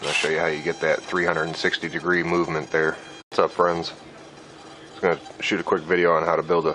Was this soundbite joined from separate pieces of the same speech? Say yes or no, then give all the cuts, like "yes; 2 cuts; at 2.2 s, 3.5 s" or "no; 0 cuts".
no; 0 cuts